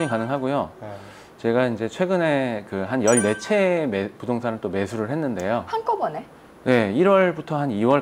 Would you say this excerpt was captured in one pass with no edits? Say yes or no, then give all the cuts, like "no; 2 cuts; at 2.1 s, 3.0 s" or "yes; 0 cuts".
yes; 0 cuts